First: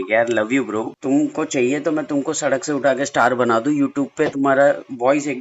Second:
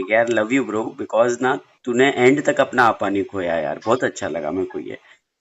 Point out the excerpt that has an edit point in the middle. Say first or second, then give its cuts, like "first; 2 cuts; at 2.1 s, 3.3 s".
first; 1 cut; at 0.9 s